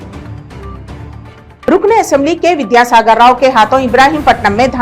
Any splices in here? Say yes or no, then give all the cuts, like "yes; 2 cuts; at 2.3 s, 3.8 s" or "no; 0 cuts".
no; 0 cuts